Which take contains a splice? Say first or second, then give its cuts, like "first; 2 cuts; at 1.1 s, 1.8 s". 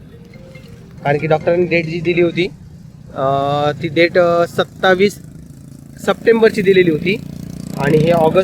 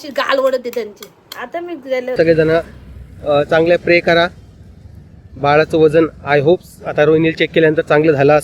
second; 1 cut; at 2.1 s